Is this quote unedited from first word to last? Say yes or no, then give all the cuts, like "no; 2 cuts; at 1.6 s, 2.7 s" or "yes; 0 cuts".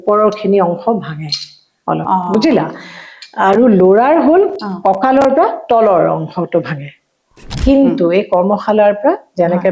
no; 1 cut; at 7.5 s